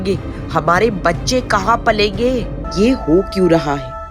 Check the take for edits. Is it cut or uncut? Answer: cut